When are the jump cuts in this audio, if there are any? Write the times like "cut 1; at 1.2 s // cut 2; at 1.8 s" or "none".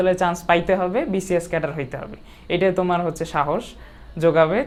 none